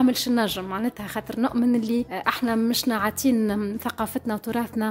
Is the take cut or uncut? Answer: uncut